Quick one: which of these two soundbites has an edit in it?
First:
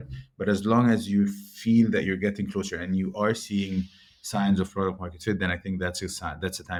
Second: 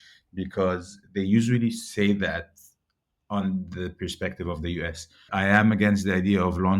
second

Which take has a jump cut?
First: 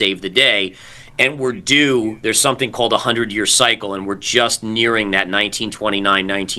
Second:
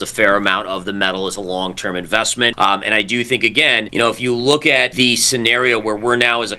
second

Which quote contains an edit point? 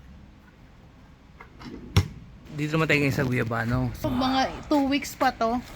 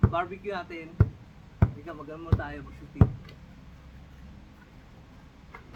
first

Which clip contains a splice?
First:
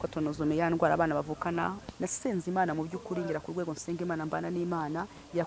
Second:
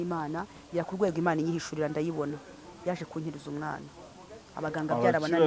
first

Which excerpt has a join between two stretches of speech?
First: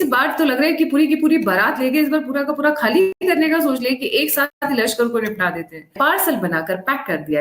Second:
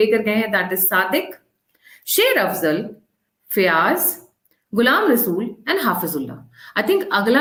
first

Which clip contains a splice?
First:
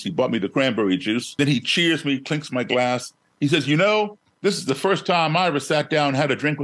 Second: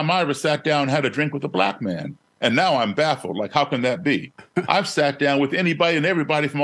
first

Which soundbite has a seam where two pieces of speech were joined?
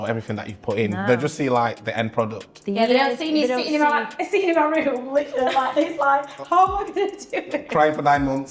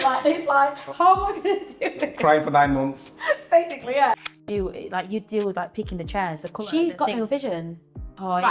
second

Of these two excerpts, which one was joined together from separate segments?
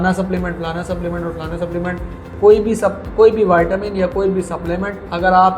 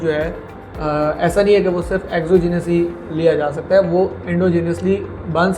first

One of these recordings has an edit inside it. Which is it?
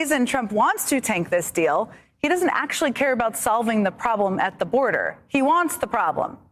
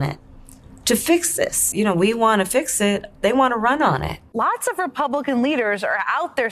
second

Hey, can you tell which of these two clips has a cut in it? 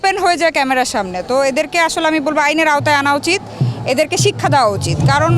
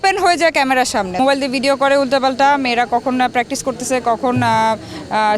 second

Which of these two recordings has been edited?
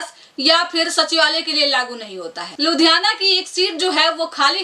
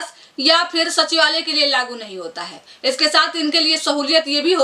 first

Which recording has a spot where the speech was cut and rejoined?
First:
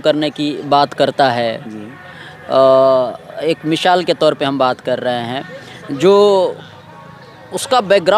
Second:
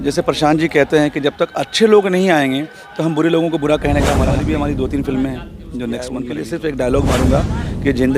second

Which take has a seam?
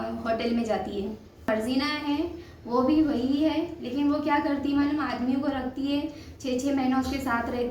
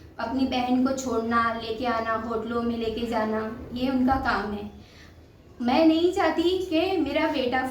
first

